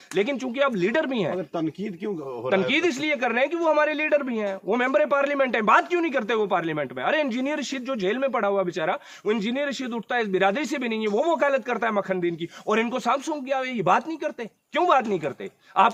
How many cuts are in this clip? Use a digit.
0